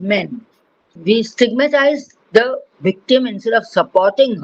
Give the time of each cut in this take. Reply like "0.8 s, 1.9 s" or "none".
0.9 s